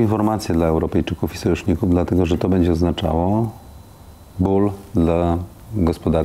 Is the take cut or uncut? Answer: uncut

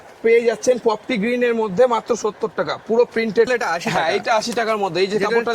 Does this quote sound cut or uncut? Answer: cut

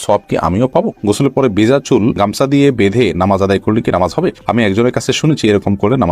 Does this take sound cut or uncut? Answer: cut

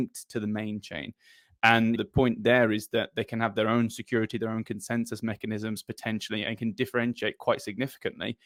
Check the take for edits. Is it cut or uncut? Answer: uncut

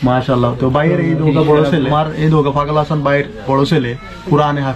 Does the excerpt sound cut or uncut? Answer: cut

